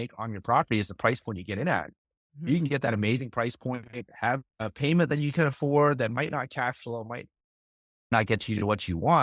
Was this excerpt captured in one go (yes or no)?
no